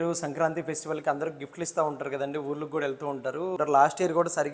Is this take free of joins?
no; 1 cut; at 3.6 s

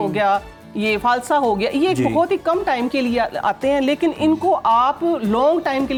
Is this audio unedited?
yes; 0 cuts

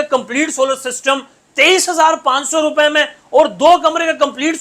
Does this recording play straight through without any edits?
yes; 0 cuts

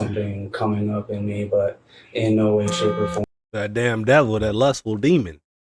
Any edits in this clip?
no; 0 cuts

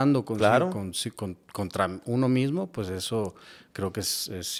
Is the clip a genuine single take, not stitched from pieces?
yes; 0 cuts

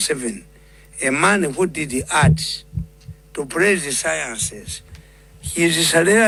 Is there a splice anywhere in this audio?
no; 0 cuts

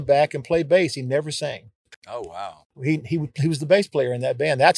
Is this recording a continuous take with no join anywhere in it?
yes; 0 cuts

